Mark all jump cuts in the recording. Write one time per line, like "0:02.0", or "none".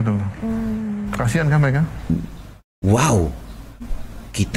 0:02.1